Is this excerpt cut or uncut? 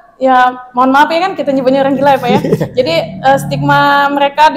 uncut